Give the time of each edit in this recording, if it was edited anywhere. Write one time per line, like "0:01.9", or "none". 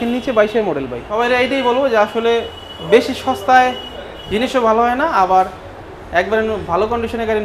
0:01.2